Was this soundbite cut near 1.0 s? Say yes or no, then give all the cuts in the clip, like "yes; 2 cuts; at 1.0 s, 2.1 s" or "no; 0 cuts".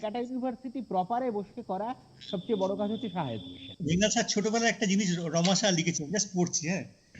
no; 1 cut; at 3.8 s